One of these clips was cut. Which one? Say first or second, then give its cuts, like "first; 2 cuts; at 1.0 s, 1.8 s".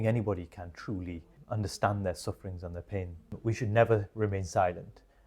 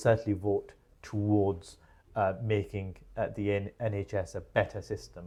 first; 2 cuts; at 1.3 s, 3.3 s